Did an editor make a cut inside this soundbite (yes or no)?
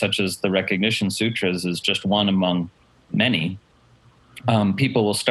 no